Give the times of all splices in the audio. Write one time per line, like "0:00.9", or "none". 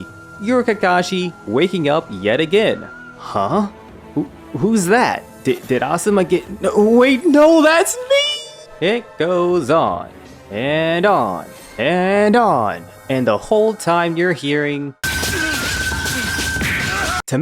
none